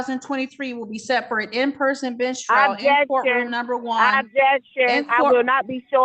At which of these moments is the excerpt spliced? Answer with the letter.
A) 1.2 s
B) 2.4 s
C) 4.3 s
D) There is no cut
D